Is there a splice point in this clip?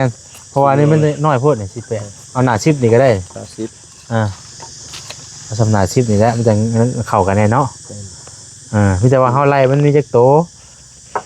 no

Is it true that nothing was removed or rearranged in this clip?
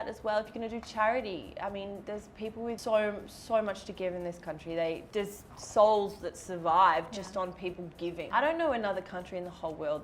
no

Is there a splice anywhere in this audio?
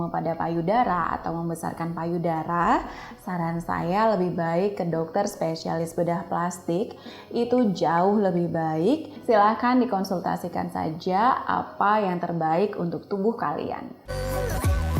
yes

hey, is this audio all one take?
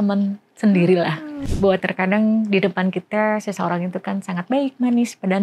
no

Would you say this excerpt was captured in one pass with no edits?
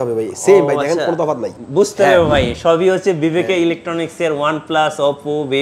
no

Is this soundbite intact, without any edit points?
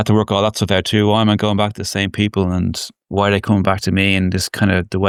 yes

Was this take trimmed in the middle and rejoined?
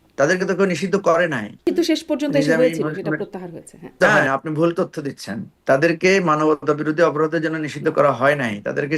yes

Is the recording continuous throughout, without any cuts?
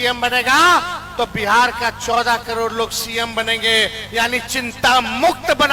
yes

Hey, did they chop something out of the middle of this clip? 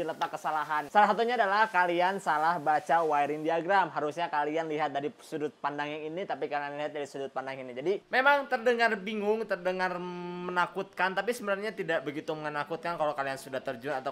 yes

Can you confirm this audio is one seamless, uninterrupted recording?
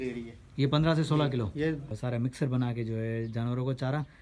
no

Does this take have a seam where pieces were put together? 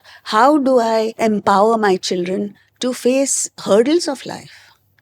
yes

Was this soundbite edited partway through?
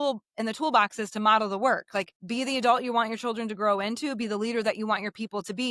yes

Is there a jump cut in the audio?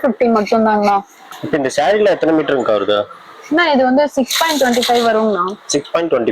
yes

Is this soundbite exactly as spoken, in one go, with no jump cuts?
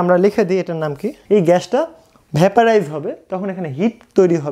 no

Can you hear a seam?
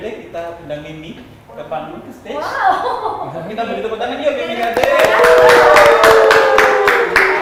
no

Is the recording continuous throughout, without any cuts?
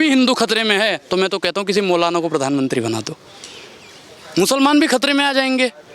yes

